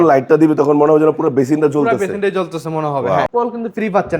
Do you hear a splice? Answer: yes; 1 cut; at 3.3 s

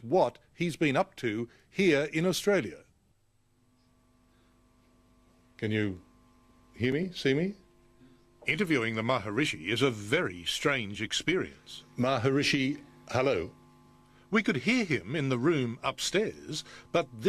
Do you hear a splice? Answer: yes; 1 cut; at 10.5 s

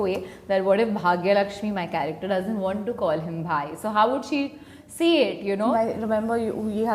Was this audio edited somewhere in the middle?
yes; 1 cut; at 5.7 s

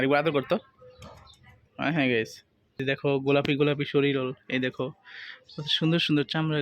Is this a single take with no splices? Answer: no; 1 cut; at 2.8 s

